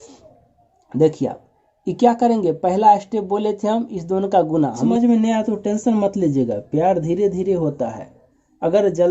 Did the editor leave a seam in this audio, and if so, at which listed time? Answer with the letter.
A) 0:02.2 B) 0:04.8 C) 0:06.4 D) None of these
B